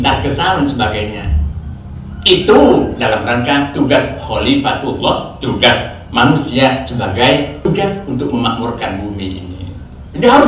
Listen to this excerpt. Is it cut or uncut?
cut